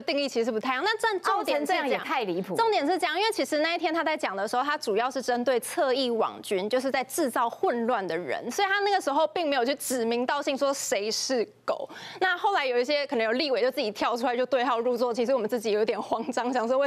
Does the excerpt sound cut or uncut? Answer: uncut